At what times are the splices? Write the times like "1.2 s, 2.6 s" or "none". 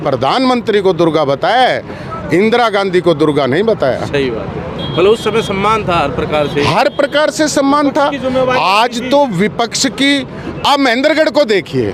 none